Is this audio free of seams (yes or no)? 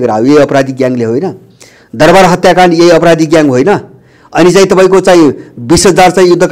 yes